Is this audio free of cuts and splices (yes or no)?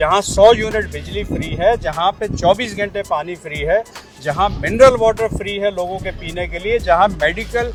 yes